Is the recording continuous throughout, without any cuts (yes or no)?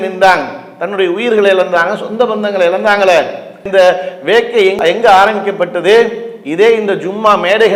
yes